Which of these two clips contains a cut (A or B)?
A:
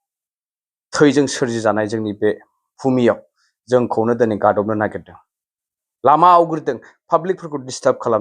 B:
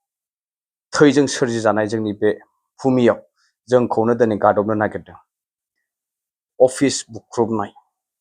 B